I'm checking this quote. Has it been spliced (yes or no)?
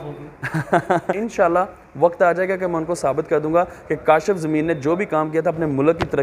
yes